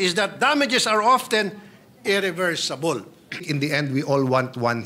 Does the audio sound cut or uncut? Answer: cut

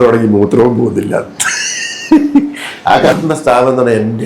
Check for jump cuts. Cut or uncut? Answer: cut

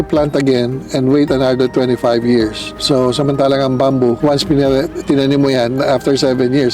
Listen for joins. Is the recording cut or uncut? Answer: cut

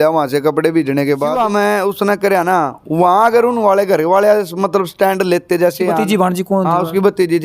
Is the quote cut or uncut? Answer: cut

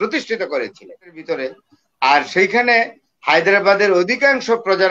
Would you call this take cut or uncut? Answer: cut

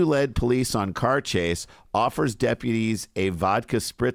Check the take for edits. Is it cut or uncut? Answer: uncut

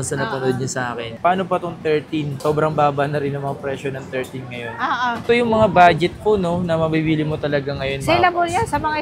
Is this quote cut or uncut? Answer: cut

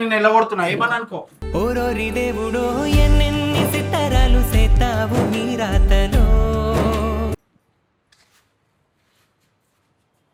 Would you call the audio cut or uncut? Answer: uncut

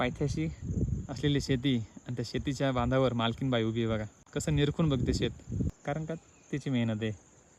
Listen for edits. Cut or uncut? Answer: cut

